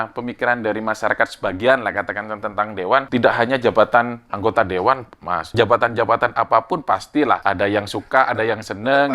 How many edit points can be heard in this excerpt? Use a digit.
3